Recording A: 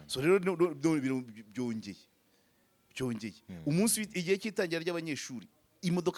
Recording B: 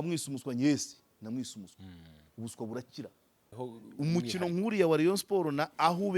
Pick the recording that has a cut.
B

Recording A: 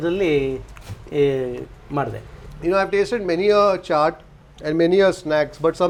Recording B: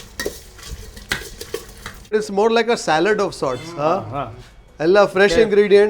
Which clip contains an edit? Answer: B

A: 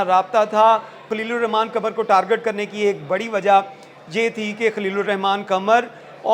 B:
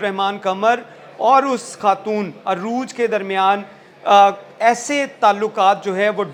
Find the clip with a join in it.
A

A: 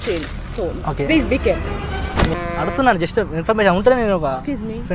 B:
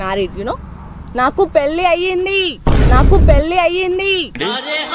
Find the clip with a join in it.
A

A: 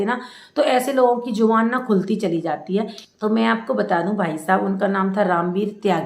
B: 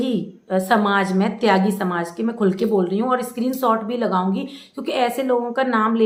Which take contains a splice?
A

